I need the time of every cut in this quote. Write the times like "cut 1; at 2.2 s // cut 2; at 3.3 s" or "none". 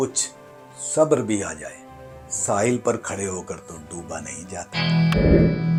none